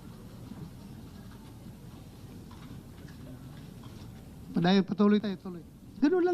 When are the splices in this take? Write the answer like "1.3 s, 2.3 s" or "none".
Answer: 5.3 s